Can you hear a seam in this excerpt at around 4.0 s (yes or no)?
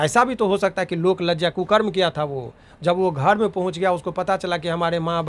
no